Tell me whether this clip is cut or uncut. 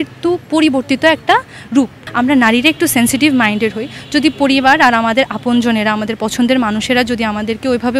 cut